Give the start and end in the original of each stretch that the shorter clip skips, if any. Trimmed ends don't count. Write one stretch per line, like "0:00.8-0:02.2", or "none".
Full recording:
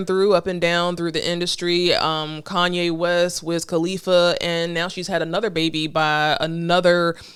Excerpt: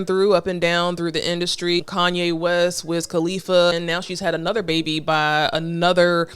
0:01.8-0:02.4
0:04.3-0:04.6